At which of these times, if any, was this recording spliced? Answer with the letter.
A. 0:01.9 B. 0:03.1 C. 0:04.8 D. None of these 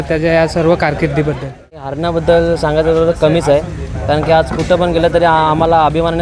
A